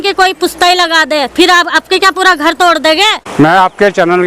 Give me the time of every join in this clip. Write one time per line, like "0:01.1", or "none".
0:03.3